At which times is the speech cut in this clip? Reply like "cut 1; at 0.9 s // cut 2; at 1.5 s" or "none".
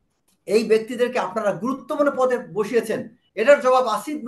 cut 1; at 3.2 s